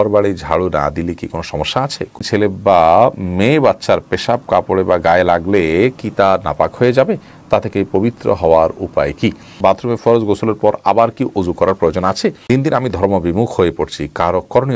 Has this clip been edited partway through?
yes; 3 cuts; at 2.2 s, 9.5 s, 12.4 s

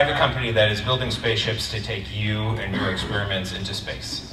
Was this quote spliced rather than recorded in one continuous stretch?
no; 0 cuts

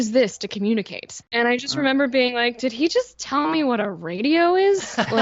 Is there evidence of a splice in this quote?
yes; 1 cut; at 1.2 s

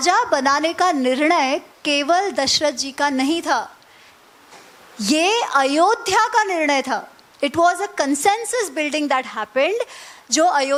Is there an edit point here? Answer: no; 0 cuts

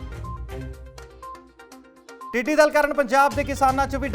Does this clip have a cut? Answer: yes; 2 cuts; at 1.5 s, 2.2 s

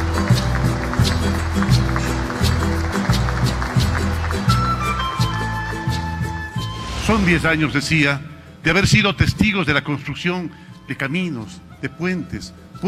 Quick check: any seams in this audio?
no; 0 cuts

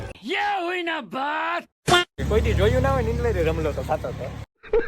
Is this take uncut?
no; 1 cut; at 2.2 s

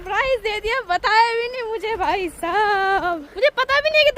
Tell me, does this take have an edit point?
yes; 1 cut; at 3.3 s

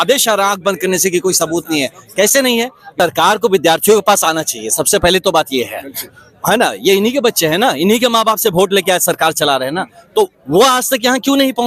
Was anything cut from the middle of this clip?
yes; 1 cut; at 2.9 s

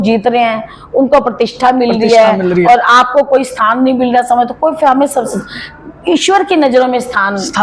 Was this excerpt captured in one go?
yes; 0 cuts

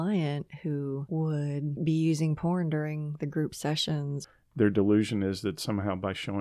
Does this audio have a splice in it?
yes; 2 cuts; at 1.2 s, 4.2 s

